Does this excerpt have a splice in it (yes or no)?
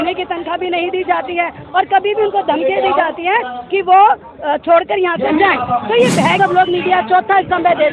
yes